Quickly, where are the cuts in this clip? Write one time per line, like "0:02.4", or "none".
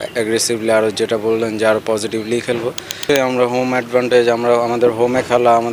0:03.0